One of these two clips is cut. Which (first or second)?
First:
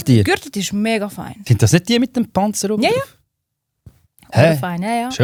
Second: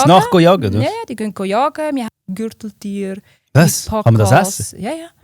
second